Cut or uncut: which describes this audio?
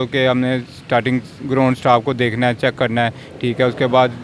uncut